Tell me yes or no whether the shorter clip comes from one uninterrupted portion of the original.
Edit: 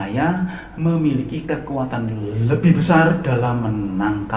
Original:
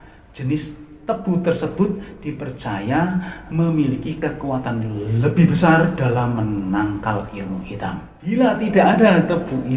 yes